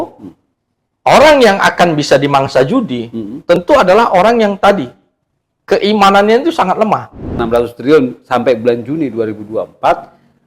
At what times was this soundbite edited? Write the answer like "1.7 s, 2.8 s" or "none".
7.4 s